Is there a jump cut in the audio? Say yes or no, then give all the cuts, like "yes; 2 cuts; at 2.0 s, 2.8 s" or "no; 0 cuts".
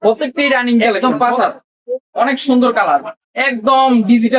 yes; 1 cut; at 0.9 s